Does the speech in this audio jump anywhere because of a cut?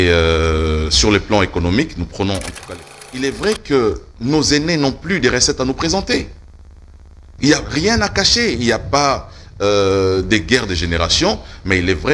yes; 1 cut; at 2.6 s

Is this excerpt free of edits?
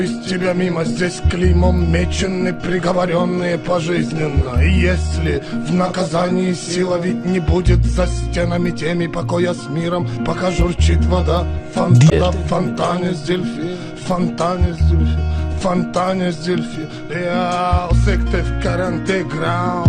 no; 1 cut; at 12.1 s

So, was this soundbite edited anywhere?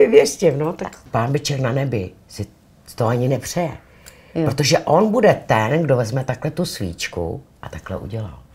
yes; 1 cut; at 1.0 s

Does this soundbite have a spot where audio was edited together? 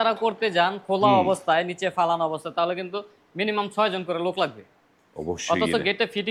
no; 0 cuts

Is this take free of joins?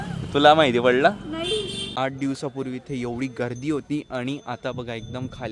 no; 1 cut; at 1.8 s

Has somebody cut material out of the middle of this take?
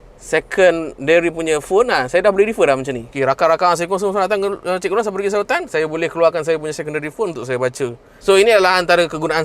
yes; 1 cut; at 3.0 s

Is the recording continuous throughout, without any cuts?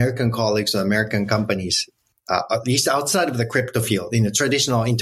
yes; 0 cuts

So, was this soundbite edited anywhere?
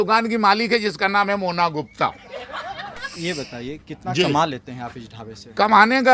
yes; 1 cut; at 3.1 s

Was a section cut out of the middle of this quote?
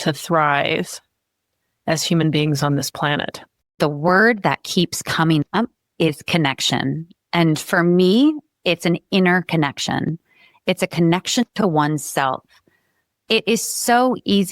yes; 1 cut; at 3.6 s

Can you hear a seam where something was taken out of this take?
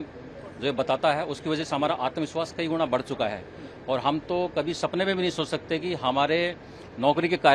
no; 0 cuts

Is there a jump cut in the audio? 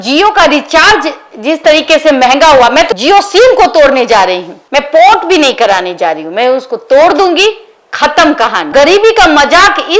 no; 0 cuts

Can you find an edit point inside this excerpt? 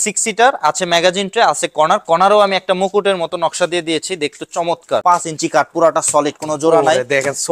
yes; 1 cut; at 5.0 s

